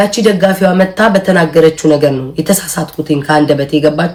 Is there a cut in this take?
no; 0 cuts

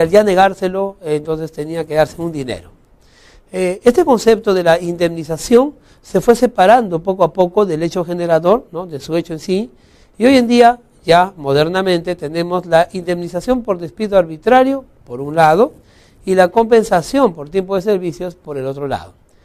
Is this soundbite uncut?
no; 1 cut; at 18.5 s

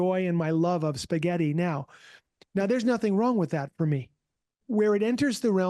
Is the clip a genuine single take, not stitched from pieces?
no; 1 cut; at 4.6 s

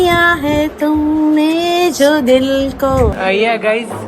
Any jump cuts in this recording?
yes; 1 cut; at 3.1 s

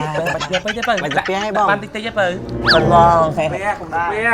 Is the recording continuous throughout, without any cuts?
no; 1 cut; at 2.6 s

